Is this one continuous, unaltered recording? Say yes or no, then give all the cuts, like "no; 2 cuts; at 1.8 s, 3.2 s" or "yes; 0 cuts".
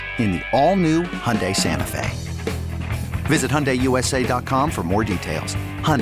yes; 0 cuts